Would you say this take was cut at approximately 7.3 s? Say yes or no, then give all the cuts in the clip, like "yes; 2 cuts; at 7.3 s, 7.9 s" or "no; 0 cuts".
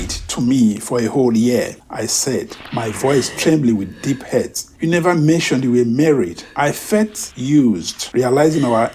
yes; 3 cuts; at 4.6 s, 6.4 s, 7.3 s